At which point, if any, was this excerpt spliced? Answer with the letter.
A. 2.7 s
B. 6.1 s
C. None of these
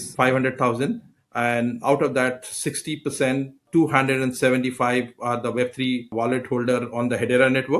B